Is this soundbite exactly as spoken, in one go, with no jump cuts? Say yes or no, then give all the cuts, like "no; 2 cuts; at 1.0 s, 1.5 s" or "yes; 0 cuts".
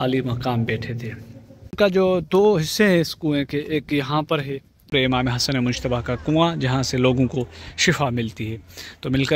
no; 2 cuts; at 1.8 s, 4.9 s